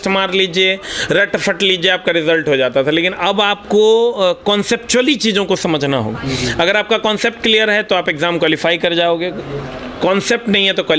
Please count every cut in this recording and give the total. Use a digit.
0